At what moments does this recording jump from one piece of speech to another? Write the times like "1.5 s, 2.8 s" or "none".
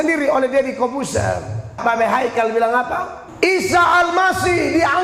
1.8 s, 3.2 s